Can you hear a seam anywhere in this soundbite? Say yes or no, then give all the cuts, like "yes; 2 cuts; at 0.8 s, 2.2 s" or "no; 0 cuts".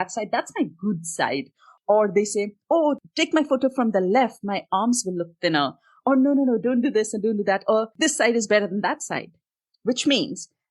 yes; 3 cuts; at 1.7 s, 3.0 s, 7.9 s